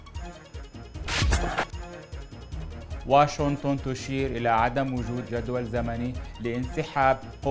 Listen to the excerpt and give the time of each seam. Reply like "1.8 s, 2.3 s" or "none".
1.0 s, 1.7 s, 3.0 s